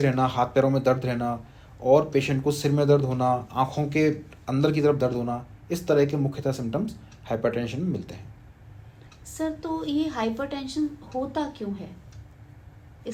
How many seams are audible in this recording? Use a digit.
0